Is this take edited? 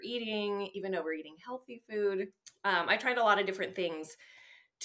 yes; 1 cut; at 2.4 s

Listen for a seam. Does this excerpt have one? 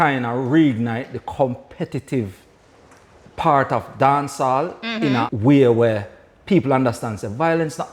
yes; 1 cut; at 5.3 s

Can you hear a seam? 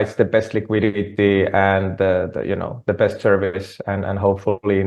no; 0 cuts

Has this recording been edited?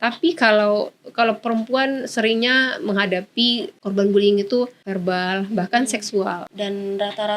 yes; 3 cuts; at 3.7 s, 4.8 s, 6.5 s

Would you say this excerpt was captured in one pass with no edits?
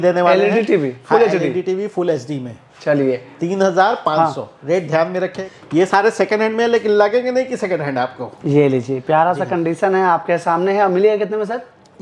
no; 1 cut; at 5.4 s

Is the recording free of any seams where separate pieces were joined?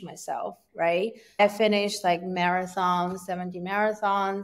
no; 1 cut; at 1.4 s

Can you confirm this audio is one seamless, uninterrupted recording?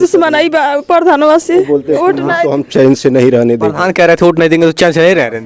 no; 1 cut; at 1.9 s

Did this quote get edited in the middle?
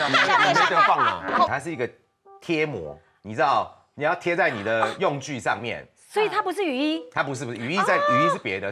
yes; 1 cut; at 1.5 s

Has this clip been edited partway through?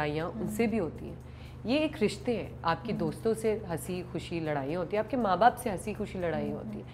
no; 0 cuts

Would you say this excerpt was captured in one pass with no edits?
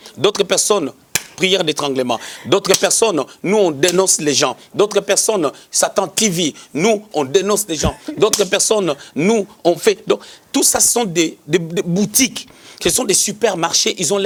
yes; 0 cuts

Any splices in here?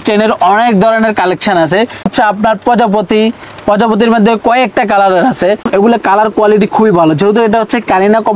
yes; 2 cuts; at 2.1 s, 5.7 s

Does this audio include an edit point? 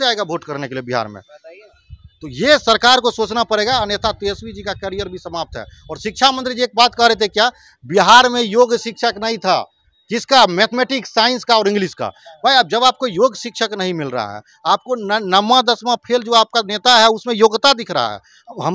no; 0 cuts

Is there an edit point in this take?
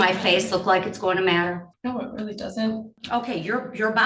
yes; 2 cuts; at 1.7 s, 2.9 s

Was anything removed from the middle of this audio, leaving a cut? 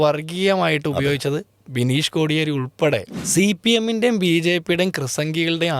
yes; 1 cut; at 3.2 s

